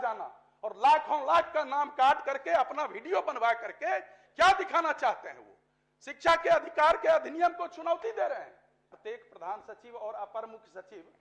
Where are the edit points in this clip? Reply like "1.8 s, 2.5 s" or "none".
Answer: 8.9 s